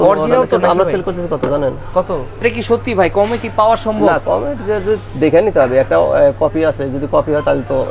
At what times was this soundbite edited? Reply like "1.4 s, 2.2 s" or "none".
2.4 s